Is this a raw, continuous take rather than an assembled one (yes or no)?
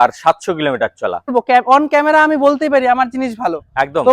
no